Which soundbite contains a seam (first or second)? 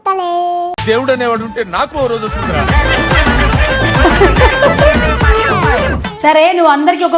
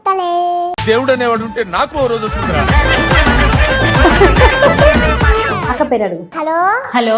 first